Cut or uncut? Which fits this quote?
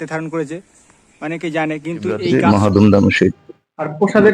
cut